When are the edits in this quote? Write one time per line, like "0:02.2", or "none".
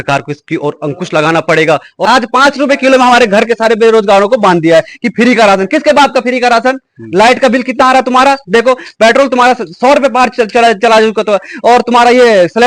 0:01.9